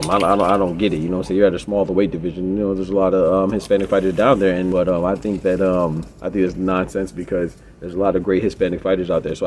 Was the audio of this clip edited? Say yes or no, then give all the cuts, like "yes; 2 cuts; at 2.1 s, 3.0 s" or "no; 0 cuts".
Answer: yes; 1 cut; at 4.7 s